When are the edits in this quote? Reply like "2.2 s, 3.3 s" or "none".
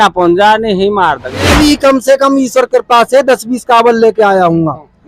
1.5 s

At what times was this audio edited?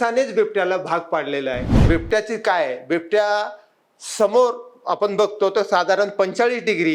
1.8 s

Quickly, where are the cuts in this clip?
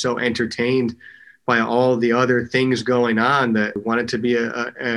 3.8 s

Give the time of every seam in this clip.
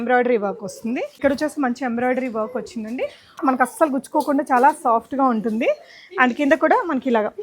1.2 s, 3.4 s

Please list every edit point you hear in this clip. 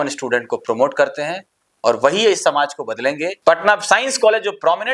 3.3 s

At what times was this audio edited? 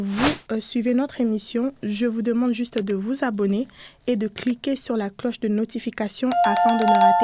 6.3 s

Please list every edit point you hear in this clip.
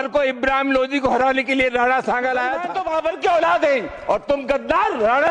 2.7 s

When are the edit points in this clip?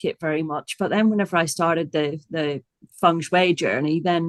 none

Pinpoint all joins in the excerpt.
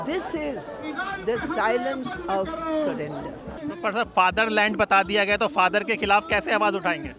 3.6 s

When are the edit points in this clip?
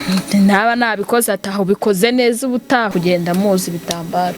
2.9 s

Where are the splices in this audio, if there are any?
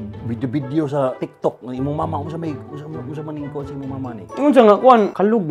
1.3 s

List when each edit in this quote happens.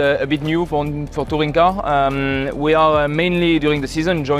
none

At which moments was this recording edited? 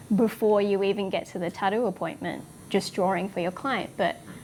none

